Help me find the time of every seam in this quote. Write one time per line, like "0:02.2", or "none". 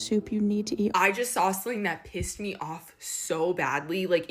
0:00.9